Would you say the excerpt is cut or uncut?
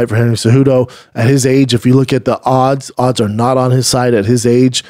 uncut